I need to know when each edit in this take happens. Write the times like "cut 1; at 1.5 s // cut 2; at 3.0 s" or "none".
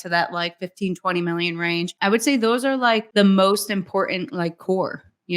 cut 1; at 1.9 s // cut 2; at 3.1 s